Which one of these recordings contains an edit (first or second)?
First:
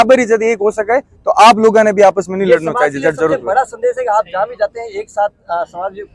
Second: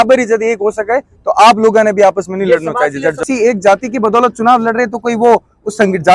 second